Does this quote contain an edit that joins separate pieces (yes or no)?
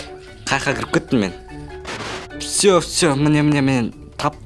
yes